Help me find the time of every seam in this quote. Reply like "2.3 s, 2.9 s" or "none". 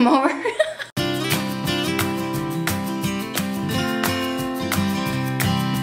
1.4 s